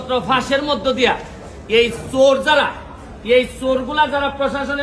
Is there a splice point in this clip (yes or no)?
no